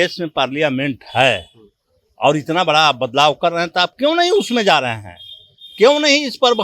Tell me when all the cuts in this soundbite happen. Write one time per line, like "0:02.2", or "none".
none